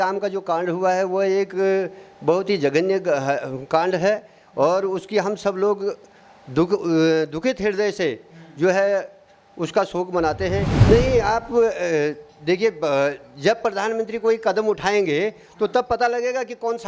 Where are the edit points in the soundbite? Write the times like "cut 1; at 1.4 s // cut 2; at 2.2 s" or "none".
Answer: cut 1; at 10.7 s